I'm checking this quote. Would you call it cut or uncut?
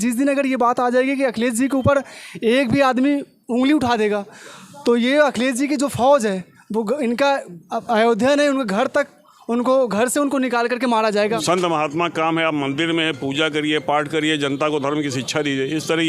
cut